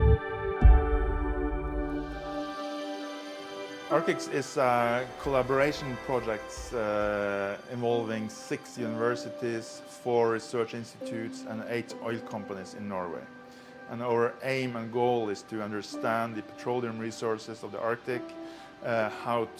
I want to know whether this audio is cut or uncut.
cut